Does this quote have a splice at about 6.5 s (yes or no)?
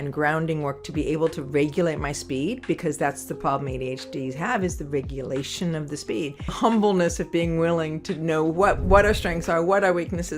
yes